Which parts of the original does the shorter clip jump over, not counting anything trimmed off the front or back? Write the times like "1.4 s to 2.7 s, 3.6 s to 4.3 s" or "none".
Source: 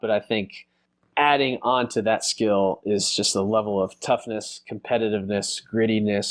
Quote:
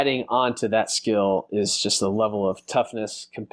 none